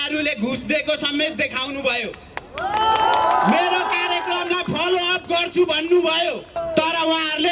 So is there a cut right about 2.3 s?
no; 1 cut; at 6.5 s

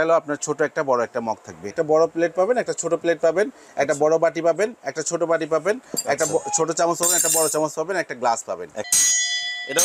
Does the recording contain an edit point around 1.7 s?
yes; 2 cuts; at 1.7 s, 8.9 s

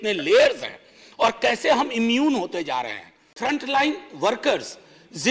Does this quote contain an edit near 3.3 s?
yes; 1 cut; at 3.3 s

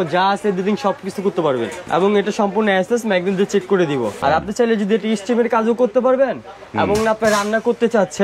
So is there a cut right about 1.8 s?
yes; 2 cuts; at 1.8 s, 4.1 s

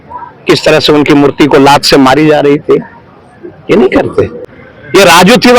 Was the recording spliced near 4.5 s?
yes; 1 cut; at 4.5 s

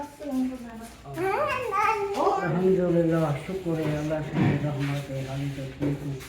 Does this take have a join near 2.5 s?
yes; 1 cut; at 2.5 s

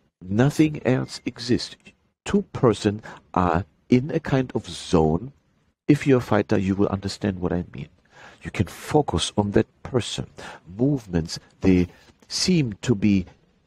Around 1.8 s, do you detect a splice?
no; 0 cuts

